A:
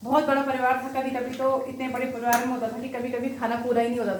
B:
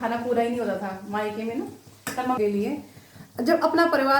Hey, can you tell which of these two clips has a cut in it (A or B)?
B